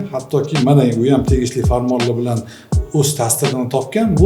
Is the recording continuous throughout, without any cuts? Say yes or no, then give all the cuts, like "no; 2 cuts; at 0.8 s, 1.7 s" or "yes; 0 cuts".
yes; 0 cuts